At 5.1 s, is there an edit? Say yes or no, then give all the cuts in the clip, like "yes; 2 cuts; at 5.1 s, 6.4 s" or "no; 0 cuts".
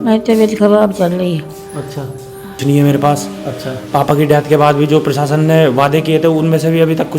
no; 1 cut; at 2.6 s